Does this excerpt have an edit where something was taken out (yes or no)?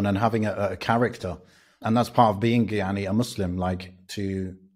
yes